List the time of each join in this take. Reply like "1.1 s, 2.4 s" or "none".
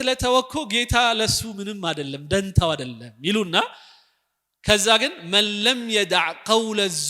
none